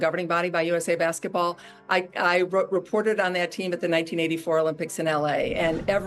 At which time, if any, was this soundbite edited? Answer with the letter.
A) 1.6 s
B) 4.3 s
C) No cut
A